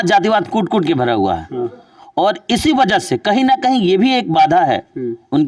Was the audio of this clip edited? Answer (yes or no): no